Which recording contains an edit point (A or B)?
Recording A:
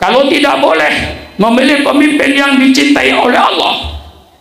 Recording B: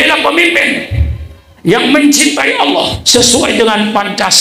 B